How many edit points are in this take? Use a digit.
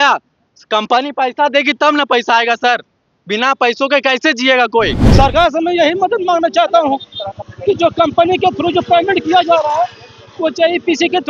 1